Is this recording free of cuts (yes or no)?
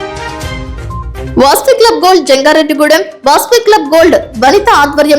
no